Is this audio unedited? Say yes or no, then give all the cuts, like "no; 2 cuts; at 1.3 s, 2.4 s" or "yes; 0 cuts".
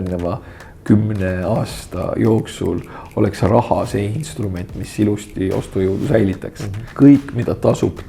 no; 1 cut; at 6.8 s